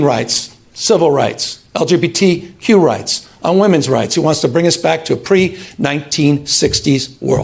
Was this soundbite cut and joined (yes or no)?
no